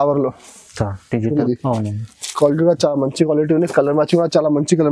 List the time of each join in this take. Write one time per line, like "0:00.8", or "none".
0:01.4